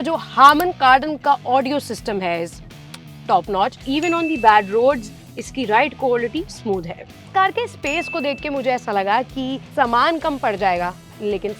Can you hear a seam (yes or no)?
yes